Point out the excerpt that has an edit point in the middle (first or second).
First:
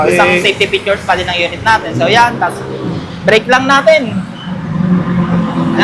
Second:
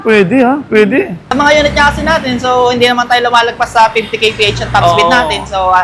second